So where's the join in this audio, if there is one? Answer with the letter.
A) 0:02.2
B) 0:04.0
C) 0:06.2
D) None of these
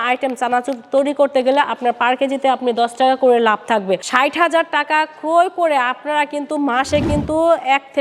B